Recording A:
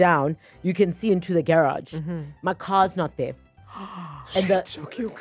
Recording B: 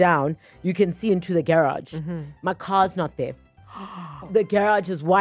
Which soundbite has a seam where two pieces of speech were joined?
B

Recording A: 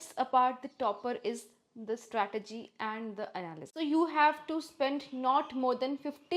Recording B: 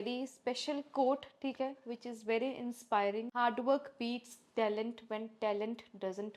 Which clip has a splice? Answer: A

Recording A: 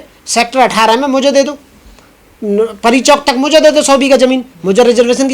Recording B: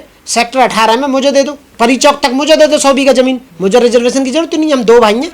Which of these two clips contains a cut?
B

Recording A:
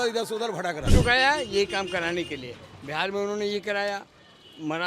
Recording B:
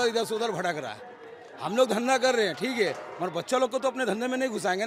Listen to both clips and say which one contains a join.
A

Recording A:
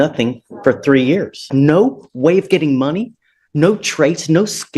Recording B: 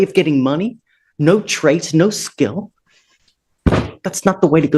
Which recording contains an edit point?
A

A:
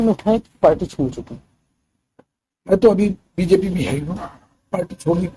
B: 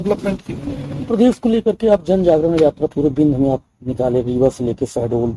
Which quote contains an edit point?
B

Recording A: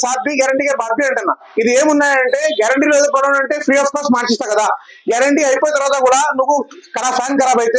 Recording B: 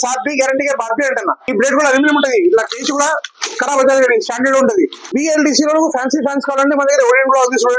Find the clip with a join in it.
B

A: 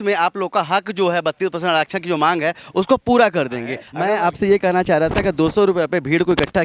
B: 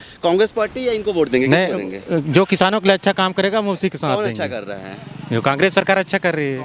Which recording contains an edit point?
A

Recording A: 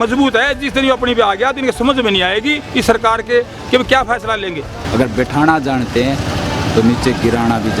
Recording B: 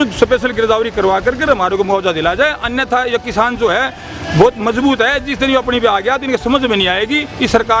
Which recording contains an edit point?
A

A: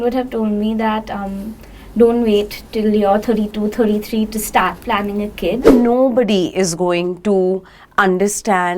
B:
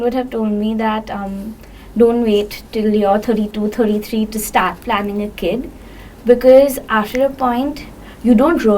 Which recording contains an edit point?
A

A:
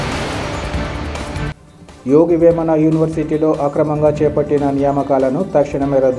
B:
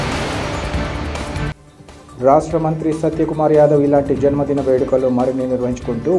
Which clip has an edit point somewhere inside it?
A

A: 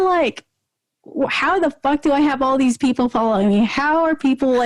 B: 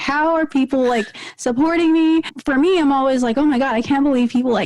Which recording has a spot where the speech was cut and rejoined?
B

